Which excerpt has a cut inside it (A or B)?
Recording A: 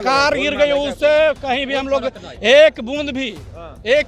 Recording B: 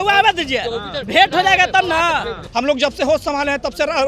B